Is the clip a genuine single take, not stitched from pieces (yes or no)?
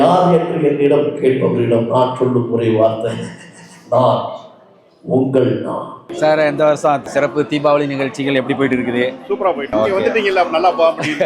no